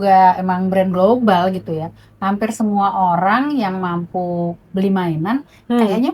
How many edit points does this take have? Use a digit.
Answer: 0